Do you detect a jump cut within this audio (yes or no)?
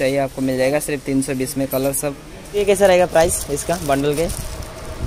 yes